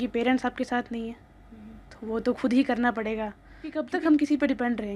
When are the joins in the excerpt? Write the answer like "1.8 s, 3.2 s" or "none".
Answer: 3.8 s